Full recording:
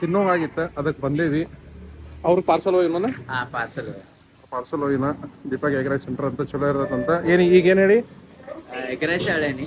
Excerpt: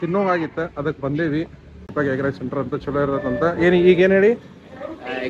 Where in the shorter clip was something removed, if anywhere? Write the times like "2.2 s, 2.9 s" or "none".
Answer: 1.9 s